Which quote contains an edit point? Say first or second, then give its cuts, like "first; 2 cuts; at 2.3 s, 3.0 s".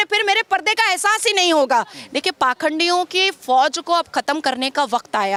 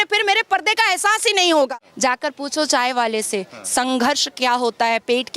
second; 1 cut; at 1.7 s